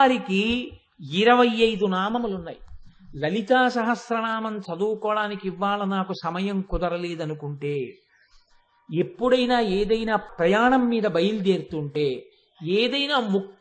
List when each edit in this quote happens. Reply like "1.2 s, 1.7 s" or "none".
10.3 s

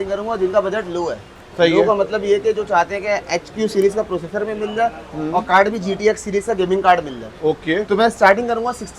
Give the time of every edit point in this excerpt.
none

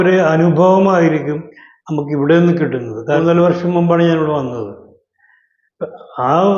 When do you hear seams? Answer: 3.0 s

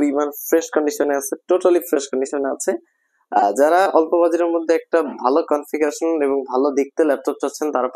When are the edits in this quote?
none

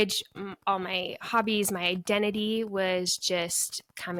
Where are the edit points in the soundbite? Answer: none

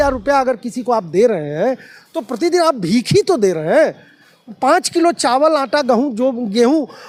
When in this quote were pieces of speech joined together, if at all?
none

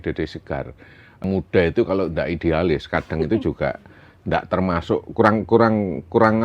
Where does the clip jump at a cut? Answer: 1.2 s

